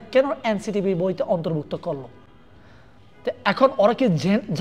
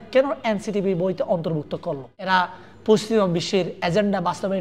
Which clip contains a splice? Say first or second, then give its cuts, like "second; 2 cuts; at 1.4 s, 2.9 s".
second; 1 cut; at 2.1 s